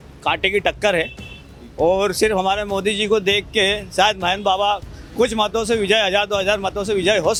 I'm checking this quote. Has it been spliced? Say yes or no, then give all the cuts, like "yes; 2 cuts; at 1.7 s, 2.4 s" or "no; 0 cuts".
no; 0 cuts